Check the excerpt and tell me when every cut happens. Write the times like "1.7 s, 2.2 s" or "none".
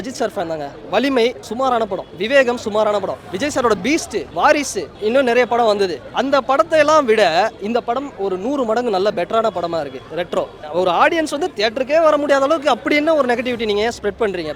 1.7 s, 3.2 s, 4.3 s, 4.9 s, 6.1 s, 10.6 s